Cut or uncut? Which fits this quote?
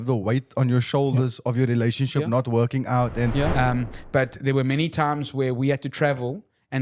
cut